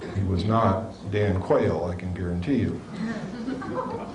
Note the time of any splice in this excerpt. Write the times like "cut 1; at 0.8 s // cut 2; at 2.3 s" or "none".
cut 1; at 2.3 s